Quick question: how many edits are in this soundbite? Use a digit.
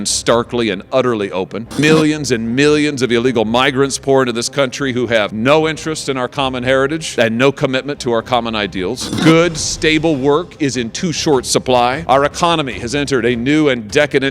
1